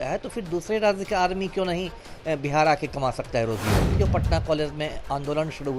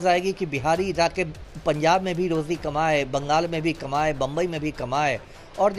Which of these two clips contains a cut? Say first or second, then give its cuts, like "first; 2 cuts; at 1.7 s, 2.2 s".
first; 1 cut; at 4.0 s